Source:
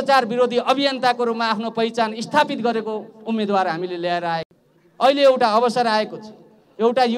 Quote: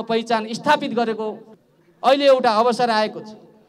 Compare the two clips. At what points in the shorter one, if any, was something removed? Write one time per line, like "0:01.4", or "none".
0:01.5